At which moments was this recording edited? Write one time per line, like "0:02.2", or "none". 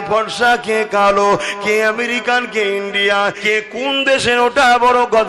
0:03.4